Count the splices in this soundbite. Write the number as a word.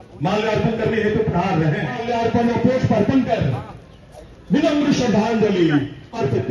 one